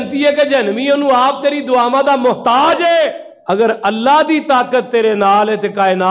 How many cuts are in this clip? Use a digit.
1